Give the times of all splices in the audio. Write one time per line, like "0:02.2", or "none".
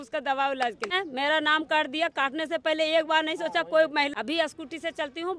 0:01.0
0:04.1